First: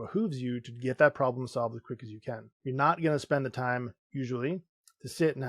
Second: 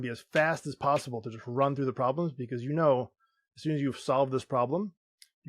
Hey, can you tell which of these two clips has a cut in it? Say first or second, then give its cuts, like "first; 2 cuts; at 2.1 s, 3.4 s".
first; 1 cut; at 2.5 s